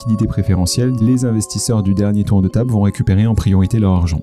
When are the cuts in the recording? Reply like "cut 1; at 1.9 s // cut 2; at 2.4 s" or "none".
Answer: cut 1; at 1.0 s

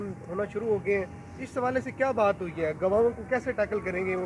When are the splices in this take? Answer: none

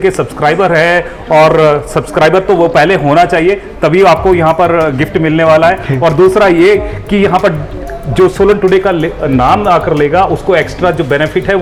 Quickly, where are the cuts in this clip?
none

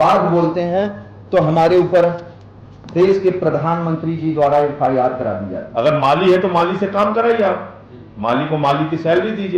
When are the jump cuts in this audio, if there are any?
cut 1; at 5.6 s

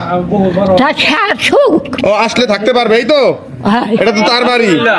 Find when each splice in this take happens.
none

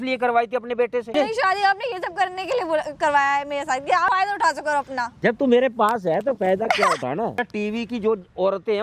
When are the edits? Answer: cut 1; at 1.2 s // cut 2; at 4.1 s // cut 3; at 5.1 s // cut 4; at 7.4 s

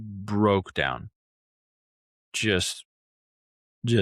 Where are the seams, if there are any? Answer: none

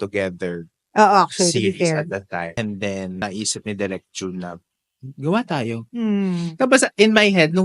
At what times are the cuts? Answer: cut 1; at 2.5 s // cut 2; at 3.2 s

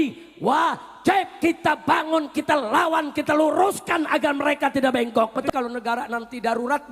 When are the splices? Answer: cut 1; at 5.5 s

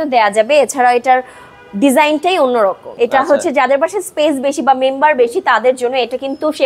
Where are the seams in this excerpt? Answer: cut 1; at 2.9 s

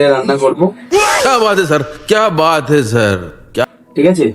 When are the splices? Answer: cut 1; at 1.1 s // cut 2; at 3.3 s

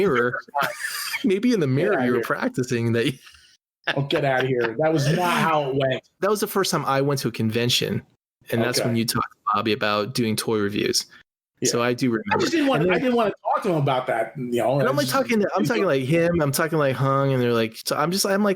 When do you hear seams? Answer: cut 1; at 6.1 s

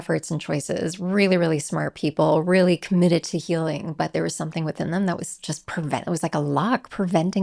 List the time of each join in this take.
none

